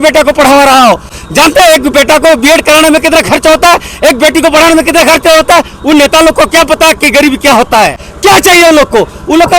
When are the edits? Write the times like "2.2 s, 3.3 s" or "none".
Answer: 1.2 s, 8.1 s